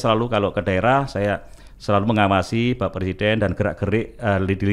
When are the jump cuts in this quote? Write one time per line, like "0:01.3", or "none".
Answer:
none

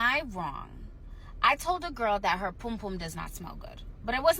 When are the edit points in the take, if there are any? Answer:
none

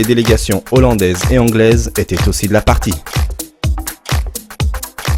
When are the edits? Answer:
0:04.0

